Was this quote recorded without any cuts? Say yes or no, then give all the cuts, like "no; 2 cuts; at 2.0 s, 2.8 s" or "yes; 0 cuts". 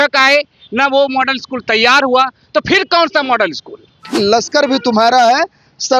no; 1 cut; at 4.1 s